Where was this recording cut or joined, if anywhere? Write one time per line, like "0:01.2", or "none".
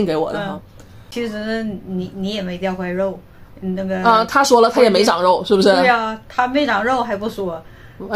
0:01.1